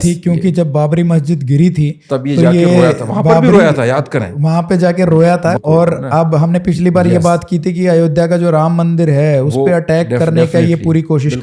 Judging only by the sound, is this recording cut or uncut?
cut